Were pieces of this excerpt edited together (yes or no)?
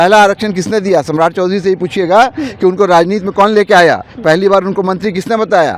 no